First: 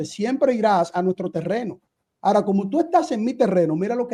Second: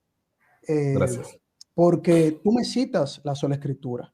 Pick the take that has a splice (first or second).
first